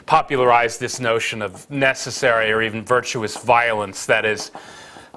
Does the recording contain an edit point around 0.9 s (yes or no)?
no